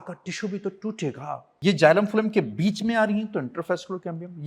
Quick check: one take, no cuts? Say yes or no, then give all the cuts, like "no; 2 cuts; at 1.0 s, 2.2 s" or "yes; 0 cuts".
no; 1 cut; at 1.5 s